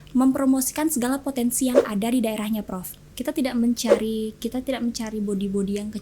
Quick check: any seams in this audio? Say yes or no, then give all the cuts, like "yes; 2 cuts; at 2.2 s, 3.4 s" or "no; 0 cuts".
yes; 1 cut; at 3.1 s